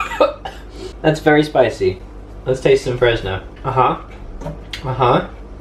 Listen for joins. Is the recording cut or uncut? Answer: uncut